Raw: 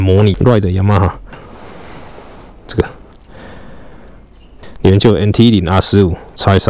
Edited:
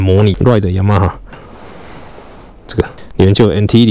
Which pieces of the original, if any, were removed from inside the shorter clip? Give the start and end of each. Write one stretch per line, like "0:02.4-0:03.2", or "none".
0:03.0-0:04.7